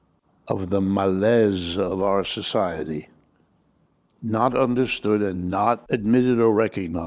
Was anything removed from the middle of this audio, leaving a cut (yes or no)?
yes